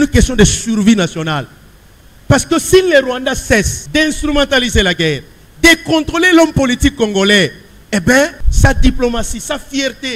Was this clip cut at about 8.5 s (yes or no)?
yes